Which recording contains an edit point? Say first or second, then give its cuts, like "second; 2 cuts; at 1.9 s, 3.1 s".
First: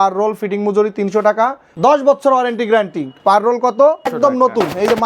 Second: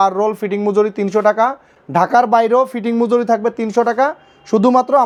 first; 2 cuts; at 1.6 s, 4.1 s